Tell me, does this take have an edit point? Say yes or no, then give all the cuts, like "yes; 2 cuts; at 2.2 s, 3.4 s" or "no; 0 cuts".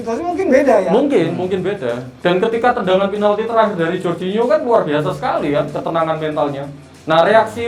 no; 0 cuts